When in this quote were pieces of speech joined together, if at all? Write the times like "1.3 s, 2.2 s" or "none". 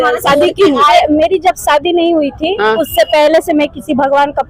0.9 s